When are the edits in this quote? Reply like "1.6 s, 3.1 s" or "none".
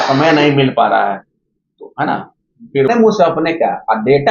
2.9 s